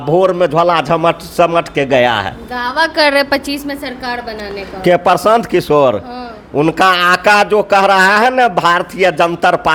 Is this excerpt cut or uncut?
uncut